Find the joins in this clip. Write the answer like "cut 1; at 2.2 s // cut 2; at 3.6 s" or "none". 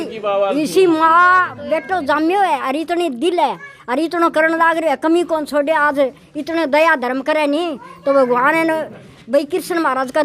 none